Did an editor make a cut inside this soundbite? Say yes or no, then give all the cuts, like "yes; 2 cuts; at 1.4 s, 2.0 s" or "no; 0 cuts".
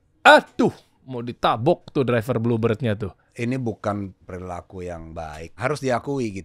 yes; 3 cuts; at 3.2 s, 4.2 s, 5.6 s